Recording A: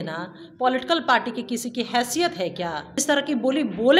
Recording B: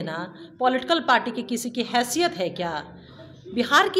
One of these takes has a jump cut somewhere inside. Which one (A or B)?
A